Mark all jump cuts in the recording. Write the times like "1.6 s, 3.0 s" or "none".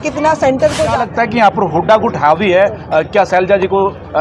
1.0 s